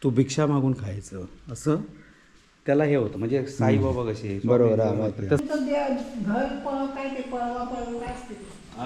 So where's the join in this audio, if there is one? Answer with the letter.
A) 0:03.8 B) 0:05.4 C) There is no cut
B